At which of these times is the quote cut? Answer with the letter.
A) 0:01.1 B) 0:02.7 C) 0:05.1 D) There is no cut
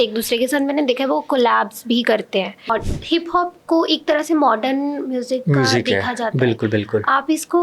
B